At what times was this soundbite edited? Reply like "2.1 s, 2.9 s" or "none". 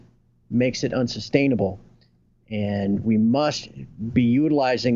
none